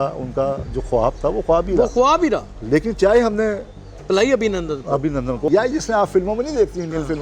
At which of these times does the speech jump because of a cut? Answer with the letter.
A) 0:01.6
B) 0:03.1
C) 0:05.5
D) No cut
C